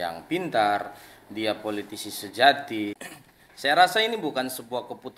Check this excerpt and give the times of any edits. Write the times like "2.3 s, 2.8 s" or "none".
3.0 s